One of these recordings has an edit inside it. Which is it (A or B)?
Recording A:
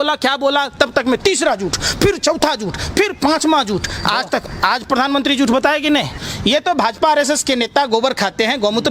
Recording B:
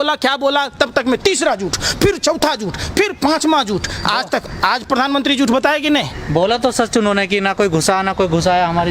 A